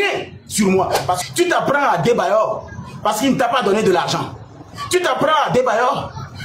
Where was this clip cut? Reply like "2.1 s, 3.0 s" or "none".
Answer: 1.2 s

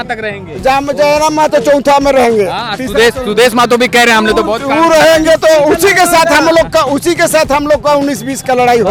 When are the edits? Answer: none

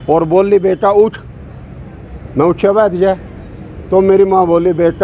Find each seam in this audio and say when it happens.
none

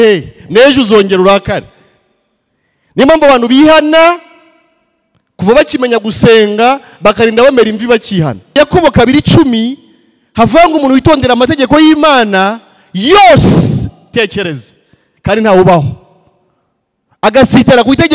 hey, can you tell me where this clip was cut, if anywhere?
8.6 s

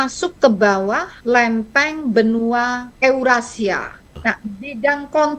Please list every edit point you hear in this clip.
1.1 s, 2.8 s, 4.1 s

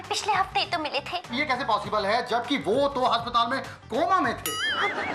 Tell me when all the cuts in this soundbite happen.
1.3 s

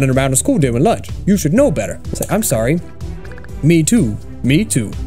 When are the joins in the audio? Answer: 2.0 s

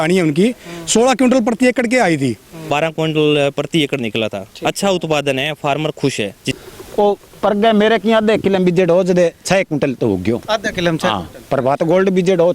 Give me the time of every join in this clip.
2.7 s, 6.4 s

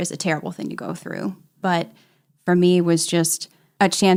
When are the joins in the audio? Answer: none

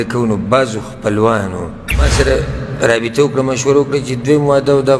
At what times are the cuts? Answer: 2.1 s

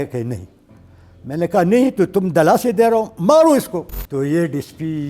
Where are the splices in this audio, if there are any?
4.0 s

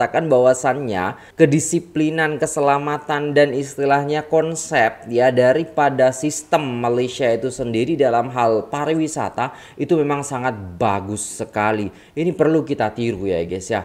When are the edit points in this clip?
1.2 s

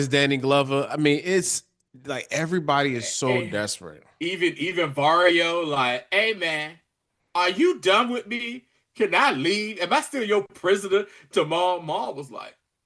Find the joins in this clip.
none

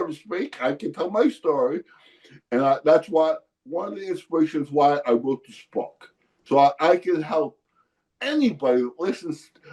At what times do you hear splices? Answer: none

